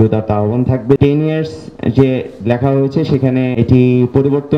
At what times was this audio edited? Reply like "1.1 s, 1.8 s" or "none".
1.0 s, 3.5 s